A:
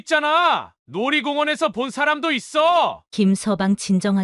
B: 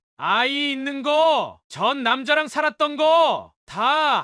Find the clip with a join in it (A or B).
A